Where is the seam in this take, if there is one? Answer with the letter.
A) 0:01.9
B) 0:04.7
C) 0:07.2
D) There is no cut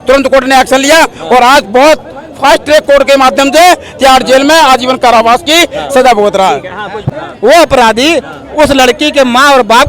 C